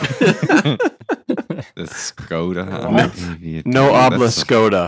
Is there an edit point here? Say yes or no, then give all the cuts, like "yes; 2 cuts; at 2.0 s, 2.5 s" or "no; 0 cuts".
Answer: no; 0 cuts